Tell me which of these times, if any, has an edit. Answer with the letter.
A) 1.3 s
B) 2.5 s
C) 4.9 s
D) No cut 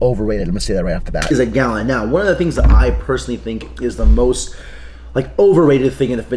A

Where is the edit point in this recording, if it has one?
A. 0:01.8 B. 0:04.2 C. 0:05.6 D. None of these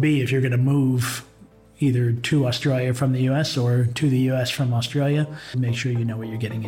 C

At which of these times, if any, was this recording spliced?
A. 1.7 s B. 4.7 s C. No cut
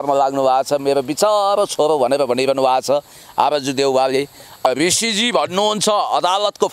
B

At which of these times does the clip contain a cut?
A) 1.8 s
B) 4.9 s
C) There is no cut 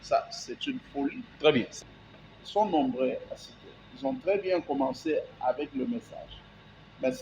A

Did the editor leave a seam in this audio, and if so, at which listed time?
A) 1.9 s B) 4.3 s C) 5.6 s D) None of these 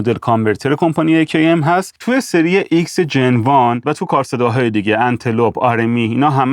A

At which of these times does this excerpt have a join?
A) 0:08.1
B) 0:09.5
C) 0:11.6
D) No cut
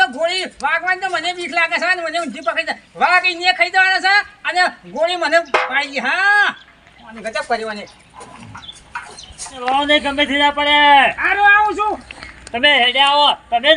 B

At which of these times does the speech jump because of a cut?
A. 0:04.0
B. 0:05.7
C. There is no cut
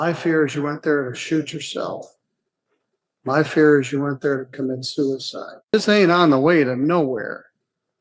B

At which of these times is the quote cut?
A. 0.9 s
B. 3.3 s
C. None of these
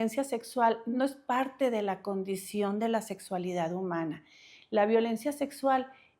A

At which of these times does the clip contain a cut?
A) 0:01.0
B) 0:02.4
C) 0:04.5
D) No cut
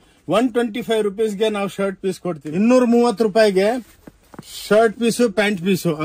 B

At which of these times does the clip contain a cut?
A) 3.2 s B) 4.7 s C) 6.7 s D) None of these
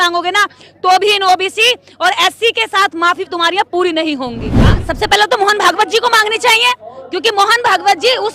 B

